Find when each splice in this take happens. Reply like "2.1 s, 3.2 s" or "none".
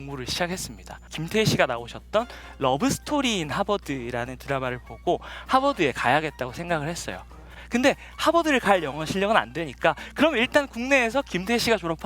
1.1 s